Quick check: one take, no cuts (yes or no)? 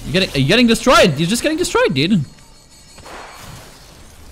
yes